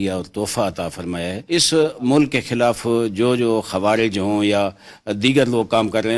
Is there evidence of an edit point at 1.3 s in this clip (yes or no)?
yes